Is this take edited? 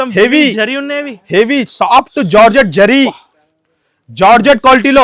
no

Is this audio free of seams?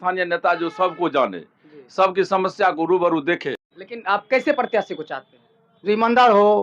no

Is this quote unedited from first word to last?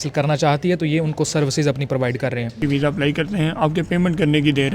no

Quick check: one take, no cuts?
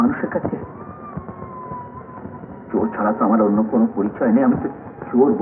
yes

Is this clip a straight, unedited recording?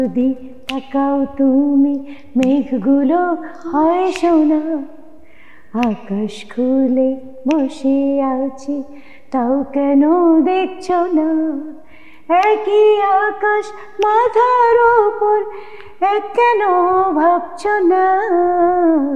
yes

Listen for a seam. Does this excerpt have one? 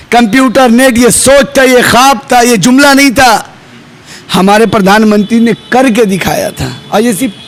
no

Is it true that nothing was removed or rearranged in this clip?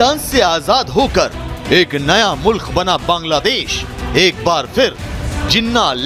yes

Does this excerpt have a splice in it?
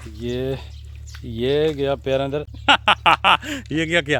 yes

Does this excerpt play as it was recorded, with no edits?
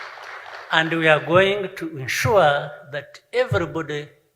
yes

